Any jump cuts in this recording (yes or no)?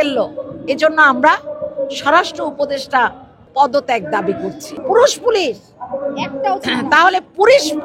yes